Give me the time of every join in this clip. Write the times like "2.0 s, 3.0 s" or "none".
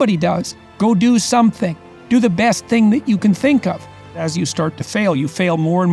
4.1 s

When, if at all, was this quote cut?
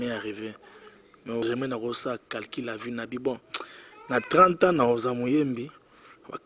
1.4 s

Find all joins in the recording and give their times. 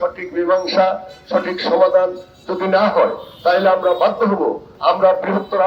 4.7 s

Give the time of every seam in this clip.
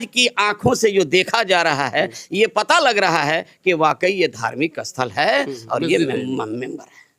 none

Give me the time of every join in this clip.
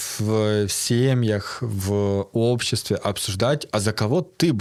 none

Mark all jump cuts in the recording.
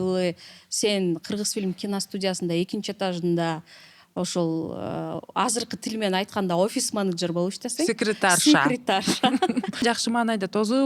9.8 s

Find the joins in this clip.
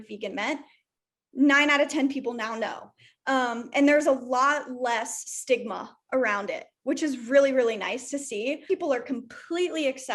8.7 s

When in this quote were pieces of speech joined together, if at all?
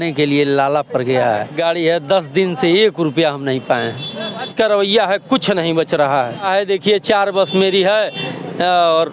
1.5 s, 4.5 s, 6.5 s

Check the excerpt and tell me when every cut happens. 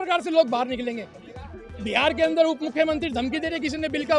none

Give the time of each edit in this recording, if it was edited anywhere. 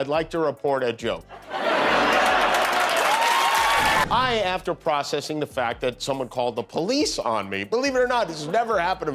none

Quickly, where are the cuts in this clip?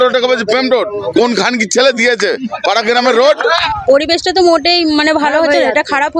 1.0 s, 3.6 s

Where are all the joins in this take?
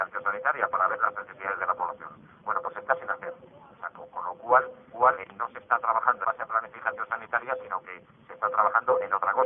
none

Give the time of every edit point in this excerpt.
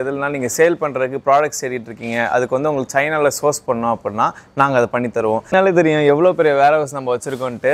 5.4 s

